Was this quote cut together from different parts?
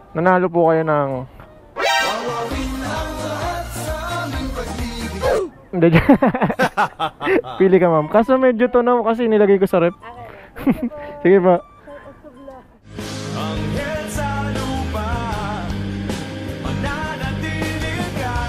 no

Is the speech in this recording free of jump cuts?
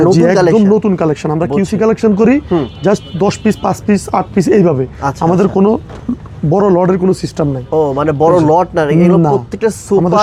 yes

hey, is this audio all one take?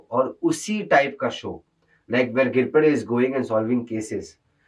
yes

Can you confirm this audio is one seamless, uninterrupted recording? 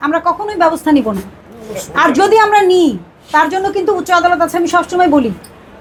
yes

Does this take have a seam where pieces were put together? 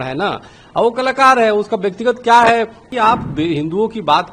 yes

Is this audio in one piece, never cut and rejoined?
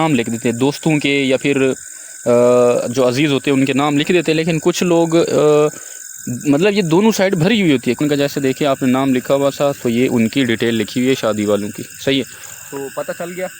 no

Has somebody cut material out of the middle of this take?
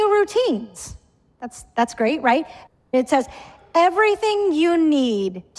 yes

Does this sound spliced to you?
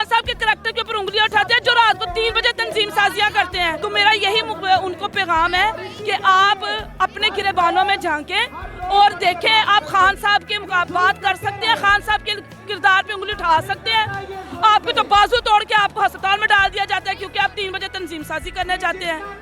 no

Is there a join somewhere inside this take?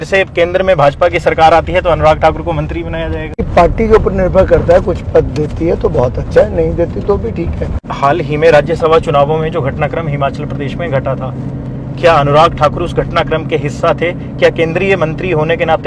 yes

